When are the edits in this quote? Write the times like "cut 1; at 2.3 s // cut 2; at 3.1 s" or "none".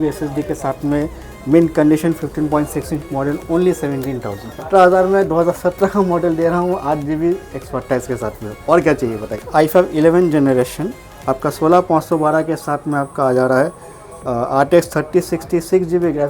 cut 1; at 4.7 s // cut 2; at 9.4 s